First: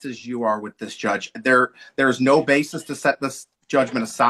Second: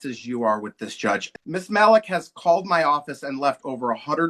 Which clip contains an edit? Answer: second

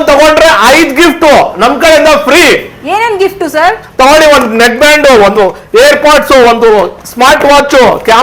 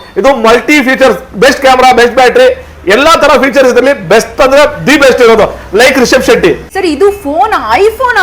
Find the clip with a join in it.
second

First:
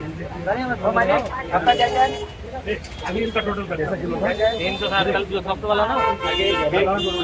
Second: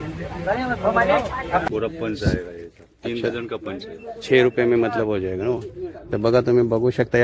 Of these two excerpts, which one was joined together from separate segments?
second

